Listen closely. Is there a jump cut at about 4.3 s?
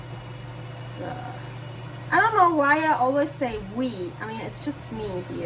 no; 1 cut; at 1.8 s

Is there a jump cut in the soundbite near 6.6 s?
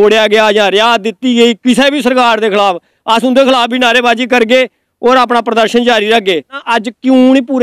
yes; 1 cut; at 6.6 s

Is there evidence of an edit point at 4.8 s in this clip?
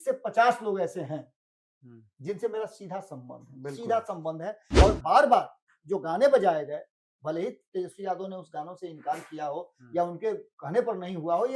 yes; 1 cut; at 4.8 s

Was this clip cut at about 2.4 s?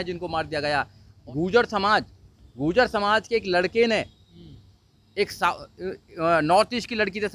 no; 1 cut; at 1.2 s

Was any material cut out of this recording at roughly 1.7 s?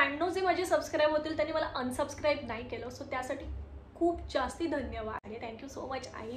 no; 1 cut; at 5.3 s

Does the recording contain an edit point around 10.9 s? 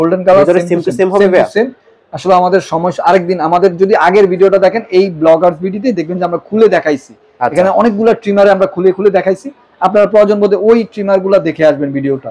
no; 0 cuts

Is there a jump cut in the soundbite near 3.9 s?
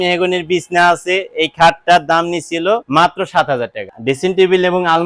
yes; 2 cuts; at 2.9 s, 3.9 s

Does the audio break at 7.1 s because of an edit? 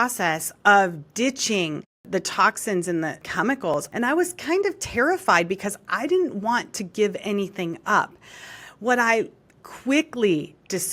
no; 1 cut; at 3.9 s

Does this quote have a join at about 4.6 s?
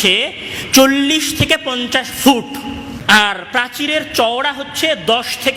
no; 1 cut; at 2.9 s

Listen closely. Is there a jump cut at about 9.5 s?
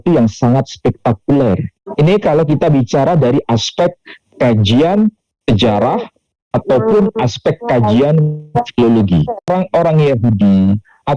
yes; 2 cuts; at 1.8 s, 9.5 s

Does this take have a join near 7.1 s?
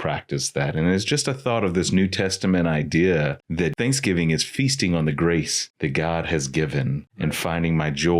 yes; 3 cuts; at 3.6 s, 5.6 s, 7.1 s

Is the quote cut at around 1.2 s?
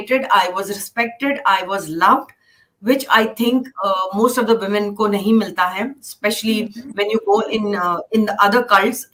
no; 0 cuts

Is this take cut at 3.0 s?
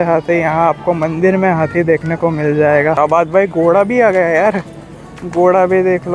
yes; 1 cut; at 3.0 s

